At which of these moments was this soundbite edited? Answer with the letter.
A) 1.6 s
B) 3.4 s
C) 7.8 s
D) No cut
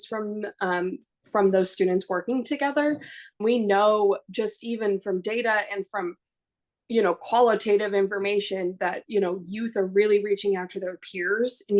B